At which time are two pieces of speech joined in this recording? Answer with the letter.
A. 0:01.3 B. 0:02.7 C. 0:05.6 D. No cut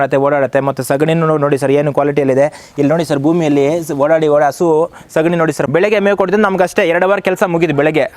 C